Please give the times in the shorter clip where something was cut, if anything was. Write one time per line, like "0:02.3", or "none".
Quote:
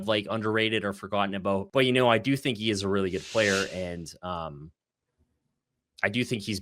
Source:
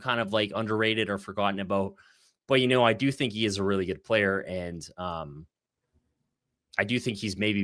0:01.7

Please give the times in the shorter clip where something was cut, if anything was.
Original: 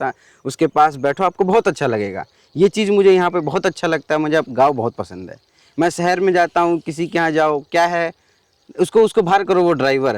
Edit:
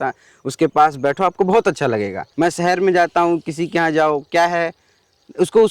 0:02.2

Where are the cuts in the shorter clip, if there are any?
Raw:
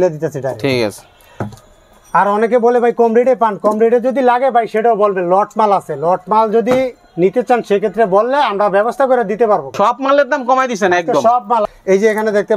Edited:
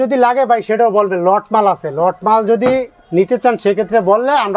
none

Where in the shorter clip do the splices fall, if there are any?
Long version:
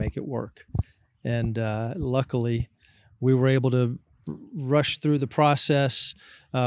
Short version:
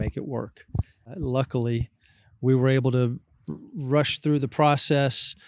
0:01.1

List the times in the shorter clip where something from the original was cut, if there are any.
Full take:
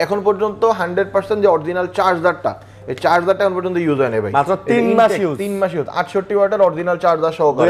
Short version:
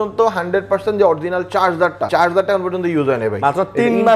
0:02.0

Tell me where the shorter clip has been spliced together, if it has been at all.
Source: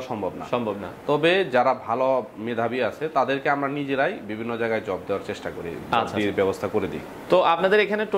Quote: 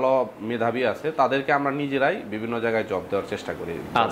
none

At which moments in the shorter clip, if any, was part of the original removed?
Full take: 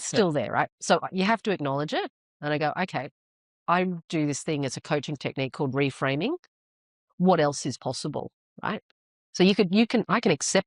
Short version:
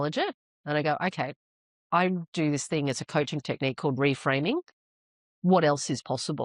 none

